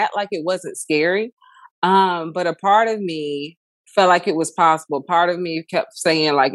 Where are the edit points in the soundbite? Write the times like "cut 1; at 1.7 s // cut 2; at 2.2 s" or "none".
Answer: none